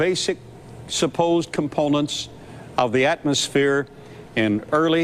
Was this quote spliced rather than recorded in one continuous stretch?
yes; 1 cut; at 1.2 s

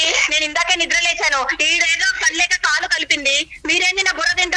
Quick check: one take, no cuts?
yes; 0 cuts

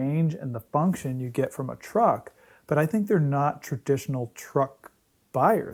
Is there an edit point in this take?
no; 0 cuts

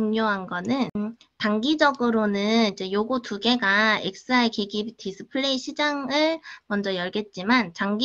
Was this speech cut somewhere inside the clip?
yes; 1 cut; at 1.0 s

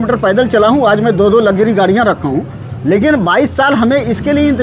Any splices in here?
no; 0 cuts

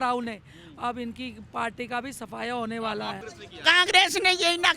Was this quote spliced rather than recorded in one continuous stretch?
yes; 1 cut; at 3.2 s

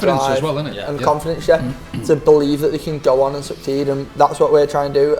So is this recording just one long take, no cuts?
yes; 0 cuts

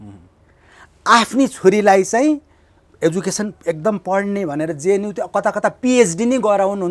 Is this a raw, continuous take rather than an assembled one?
yes; 0 cuts

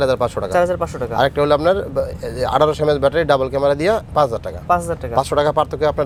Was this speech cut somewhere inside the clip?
no; 0 cuts

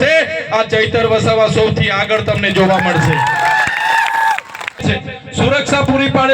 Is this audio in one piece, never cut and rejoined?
no; 1 cut; at 4.8 s

